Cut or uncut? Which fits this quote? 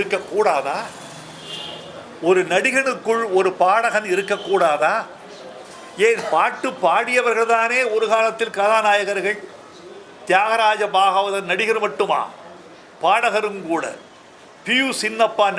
uncut